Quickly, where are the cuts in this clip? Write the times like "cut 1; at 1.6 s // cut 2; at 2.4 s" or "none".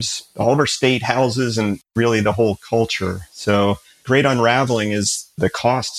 none